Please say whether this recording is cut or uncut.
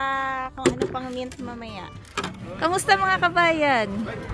cut